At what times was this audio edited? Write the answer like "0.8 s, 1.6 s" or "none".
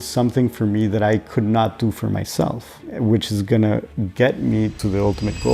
2.9 s, 4.0 s, 4.8 s